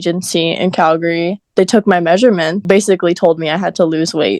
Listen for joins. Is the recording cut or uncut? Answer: cut